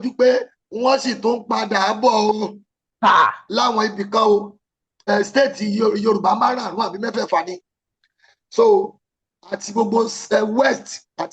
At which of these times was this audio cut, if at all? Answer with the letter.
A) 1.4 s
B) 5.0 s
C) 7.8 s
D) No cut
B